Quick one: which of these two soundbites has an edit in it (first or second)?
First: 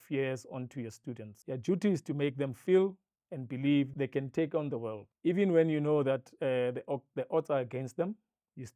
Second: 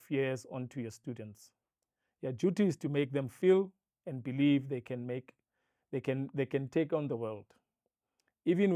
first